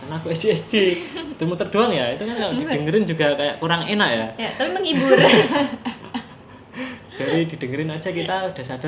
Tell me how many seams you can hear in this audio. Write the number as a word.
zero